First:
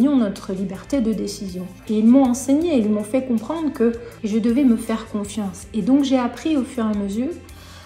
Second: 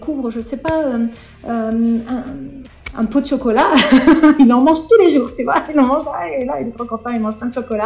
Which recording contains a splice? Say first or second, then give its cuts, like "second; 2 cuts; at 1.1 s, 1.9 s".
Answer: first; 2 cuts; at 1.7 s, 4.1 s